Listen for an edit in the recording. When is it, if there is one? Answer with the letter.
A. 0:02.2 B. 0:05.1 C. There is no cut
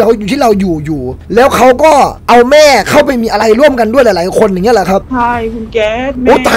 B